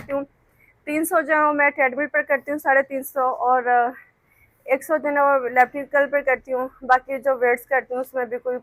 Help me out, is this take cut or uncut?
uncut